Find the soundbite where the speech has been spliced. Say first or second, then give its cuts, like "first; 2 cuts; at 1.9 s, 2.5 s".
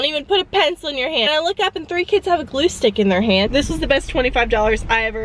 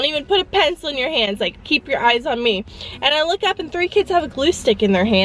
first; 2 cuts; at 1.3 s, 3.5 s